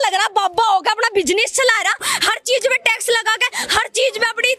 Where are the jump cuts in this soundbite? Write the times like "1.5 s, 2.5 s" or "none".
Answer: 2.1 s